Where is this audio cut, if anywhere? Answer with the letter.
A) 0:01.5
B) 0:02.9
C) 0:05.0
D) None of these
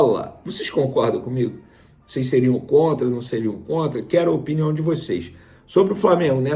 D